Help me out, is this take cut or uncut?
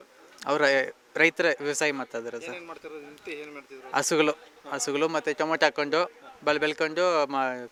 uncut